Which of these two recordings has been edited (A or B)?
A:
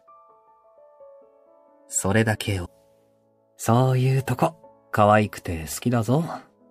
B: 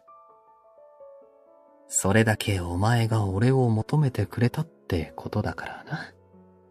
B